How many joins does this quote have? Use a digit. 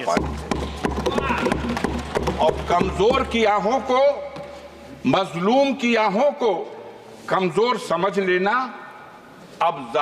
0